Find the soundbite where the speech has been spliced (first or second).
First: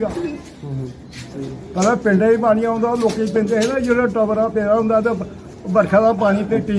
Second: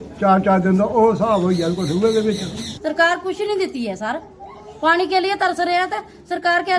second